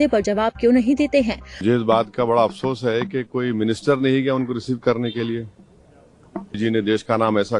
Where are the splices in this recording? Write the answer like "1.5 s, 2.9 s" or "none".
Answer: 1.5 s, 6.6 s